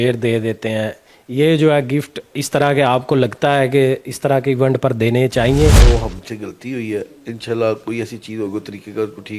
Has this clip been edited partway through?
yes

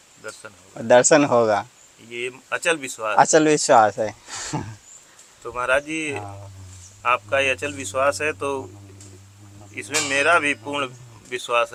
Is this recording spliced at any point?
no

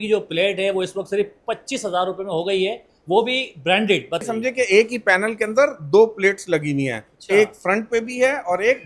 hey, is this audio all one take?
no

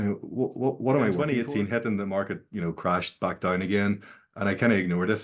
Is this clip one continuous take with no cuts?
no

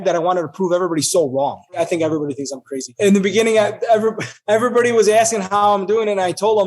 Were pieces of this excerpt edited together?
yes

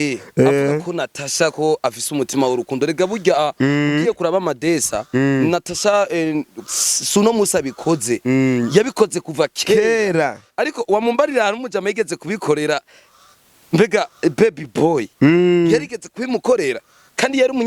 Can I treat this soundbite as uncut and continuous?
yes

